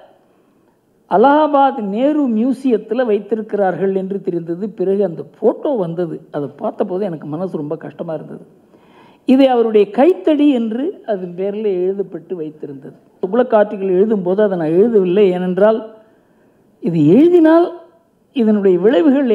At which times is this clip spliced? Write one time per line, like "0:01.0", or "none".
0:13.2